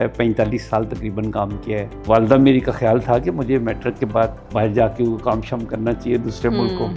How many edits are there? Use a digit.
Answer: 2